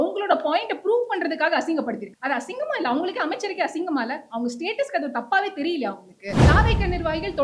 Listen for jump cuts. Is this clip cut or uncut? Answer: cut